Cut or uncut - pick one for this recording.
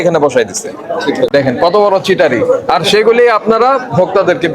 cut